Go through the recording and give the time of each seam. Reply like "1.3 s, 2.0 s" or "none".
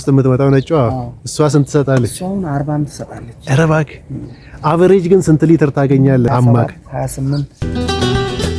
6.3 s, 7.6 s